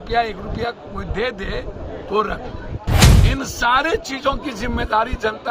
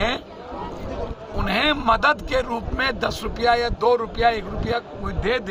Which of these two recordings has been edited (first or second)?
first